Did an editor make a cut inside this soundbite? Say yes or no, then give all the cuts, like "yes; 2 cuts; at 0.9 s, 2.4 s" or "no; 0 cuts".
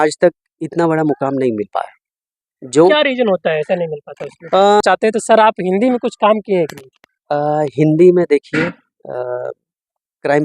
yes; 1 cut; at 4.8 s